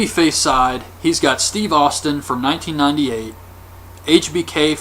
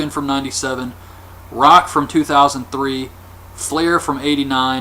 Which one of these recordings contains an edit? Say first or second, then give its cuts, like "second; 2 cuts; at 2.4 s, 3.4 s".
first; 1 cut; at 1.3 s